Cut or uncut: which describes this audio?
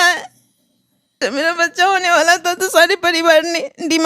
cut